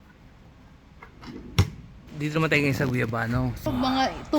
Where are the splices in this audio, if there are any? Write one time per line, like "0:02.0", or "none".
0:02.2
0:03.7